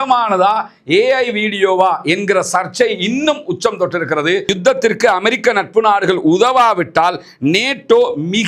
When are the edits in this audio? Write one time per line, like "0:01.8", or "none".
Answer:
0:04.5